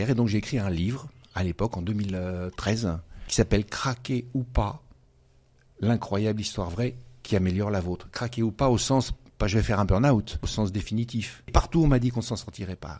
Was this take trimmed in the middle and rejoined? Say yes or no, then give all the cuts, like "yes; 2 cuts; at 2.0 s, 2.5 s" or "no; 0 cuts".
yes; 3 cuts; at 3.1 s, 10.4 s, 11.5 s